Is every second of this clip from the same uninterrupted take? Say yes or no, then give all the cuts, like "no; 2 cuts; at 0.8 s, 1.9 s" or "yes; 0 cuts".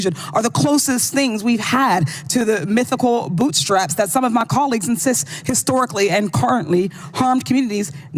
yes; 0 cuts